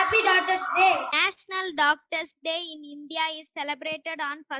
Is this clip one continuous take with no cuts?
no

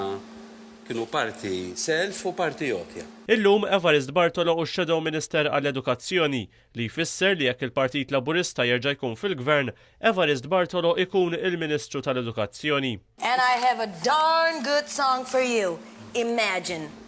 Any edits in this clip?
yes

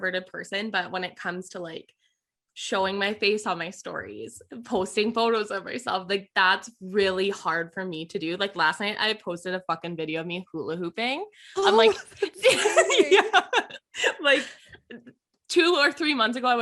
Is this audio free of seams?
yes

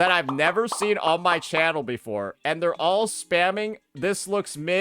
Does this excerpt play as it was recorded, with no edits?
yes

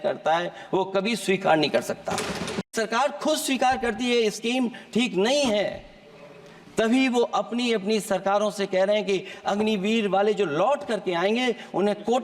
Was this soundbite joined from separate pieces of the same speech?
yes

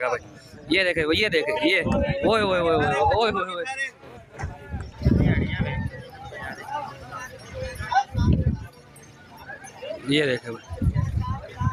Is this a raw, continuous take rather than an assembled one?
yes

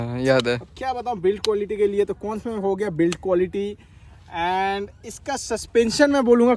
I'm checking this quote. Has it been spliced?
no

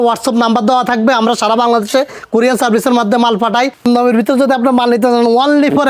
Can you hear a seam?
yes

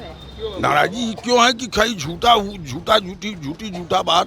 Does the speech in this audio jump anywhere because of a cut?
no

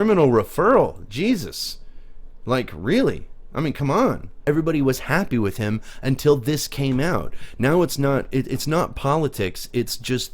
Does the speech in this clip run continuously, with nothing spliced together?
no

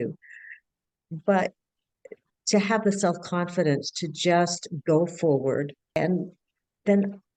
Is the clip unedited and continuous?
no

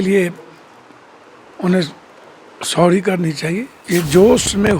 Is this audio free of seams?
no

